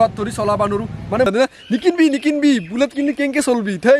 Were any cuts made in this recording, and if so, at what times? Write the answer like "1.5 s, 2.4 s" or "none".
1.3 s